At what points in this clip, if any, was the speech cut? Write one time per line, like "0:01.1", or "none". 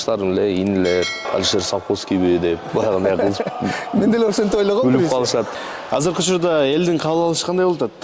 0:01.2
0:05.5